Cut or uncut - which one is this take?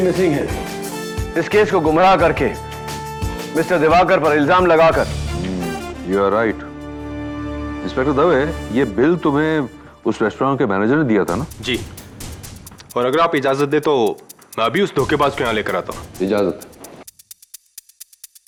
uncut